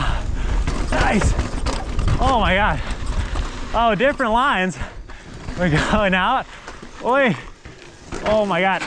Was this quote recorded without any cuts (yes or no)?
yes